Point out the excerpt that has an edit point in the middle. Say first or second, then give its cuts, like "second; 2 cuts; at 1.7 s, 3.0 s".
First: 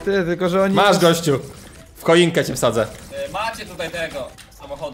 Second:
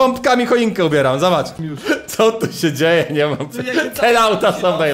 second; 1 cut; at 1.5 s